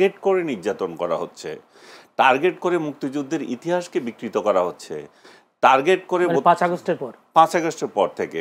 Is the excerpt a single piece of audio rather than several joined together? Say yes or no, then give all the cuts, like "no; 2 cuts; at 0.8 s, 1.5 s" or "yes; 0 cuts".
yes; 0 cuts